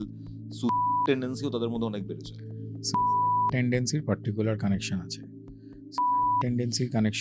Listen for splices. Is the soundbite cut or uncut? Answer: uncut